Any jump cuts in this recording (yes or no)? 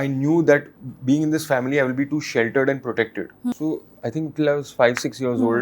yes